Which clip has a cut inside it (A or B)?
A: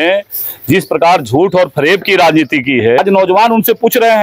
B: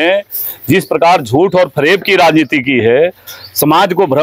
A